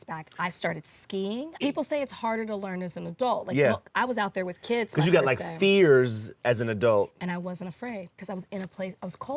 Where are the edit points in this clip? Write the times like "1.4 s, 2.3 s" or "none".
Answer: 1.5 s